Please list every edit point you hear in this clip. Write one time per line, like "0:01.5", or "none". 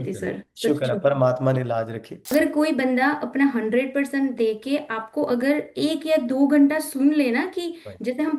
0:02.1